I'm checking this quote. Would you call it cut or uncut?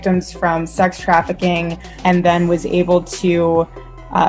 uncut